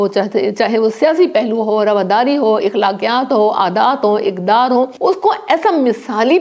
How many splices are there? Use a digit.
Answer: 1